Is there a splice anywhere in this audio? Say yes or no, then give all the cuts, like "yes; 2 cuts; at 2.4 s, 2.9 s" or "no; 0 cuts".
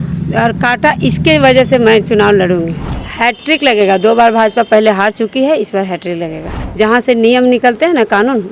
yes; 2 cuts; at 2.8 s, 6.5 s